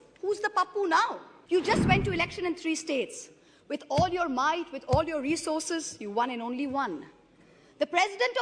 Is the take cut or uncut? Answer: cut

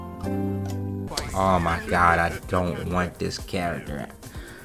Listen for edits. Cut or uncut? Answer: uncut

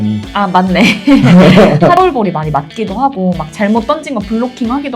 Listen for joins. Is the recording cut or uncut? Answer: cut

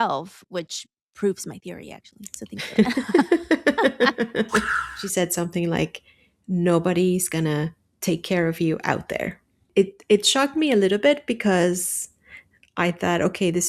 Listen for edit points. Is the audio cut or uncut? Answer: cut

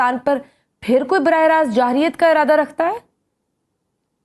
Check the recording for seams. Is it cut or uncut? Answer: uncut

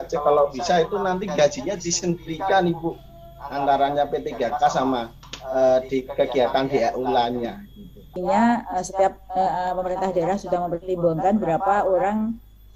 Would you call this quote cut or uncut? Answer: cut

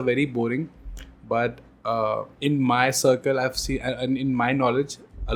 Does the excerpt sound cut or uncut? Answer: uncut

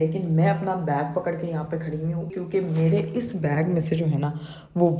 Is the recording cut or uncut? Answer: cut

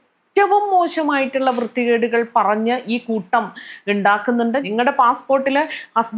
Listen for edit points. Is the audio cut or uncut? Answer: cut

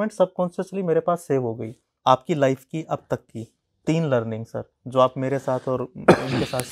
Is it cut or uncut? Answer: cut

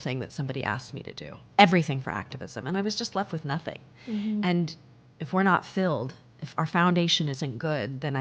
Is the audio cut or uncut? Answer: uncut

